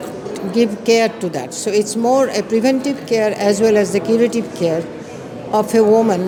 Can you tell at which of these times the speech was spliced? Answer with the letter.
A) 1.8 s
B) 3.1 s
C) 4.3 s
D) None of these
D